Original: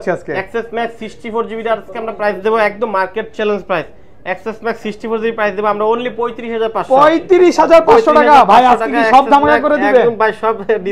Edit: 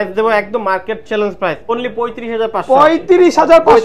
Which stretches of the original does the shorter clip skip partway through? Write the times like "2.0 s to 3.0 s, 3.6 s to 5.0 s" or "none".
4.0 s to 5.9 s